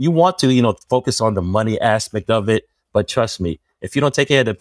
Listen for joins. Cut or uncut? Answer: uncut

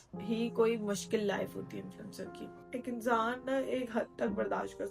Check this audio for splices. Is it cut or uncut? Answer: cut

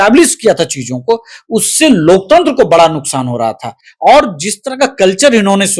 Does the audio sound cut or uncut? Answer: uncut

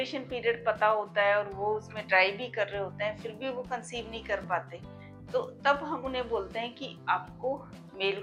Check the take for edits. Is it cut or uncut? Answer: uncut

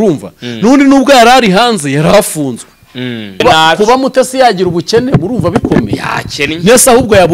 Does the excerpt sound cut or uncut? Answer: cut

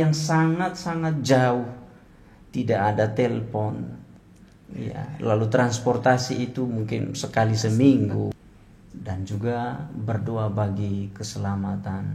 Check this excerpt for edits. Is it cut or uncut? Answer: cut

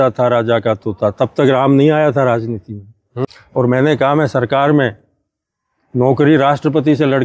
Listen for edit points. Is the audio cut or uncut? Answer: cut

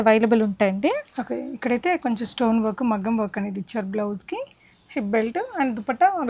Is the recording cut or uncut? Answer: uncut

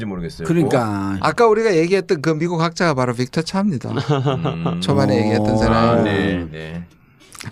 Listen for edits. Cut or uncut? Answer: cut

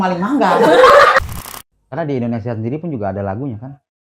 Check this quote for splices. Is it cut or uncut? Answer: cut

